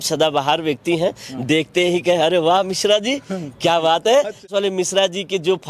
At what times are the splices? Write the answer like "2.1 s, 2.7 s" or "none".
4.5 s